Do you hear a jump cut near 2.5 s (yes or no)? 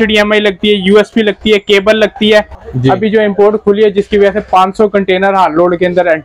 yes